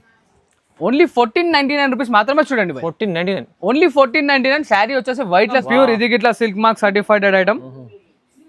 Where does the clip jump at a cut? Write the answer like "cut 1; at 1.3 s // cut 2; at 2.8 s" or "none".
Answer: cut 1; at 5.6 s